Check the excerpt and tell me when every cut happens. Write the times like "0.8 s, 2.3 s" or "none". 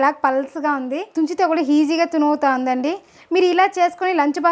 1.1 s